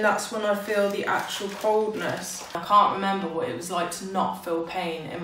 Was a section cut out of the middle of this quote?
yes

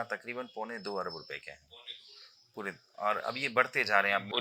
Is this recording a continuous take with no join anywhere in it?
yes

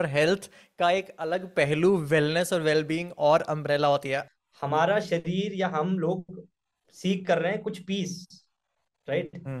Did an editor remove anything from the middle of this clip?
yes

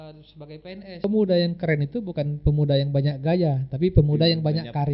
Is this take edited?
yes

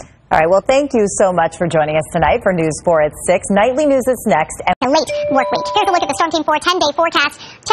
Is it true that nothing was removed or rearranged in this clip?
no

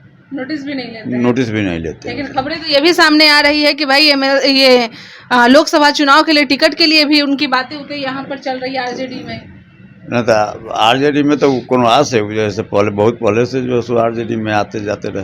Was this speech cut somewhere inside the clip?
no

